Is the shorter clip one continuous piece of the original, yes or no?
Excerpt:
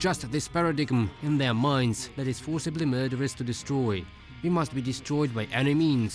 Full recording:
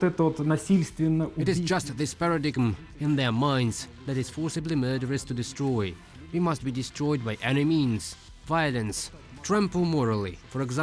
no